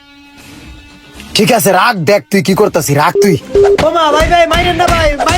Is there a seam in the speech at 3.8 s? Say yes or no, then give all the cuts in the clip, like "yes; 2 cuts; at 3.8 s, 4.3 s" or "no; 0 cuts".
yes; 1 cut; at 3.8 s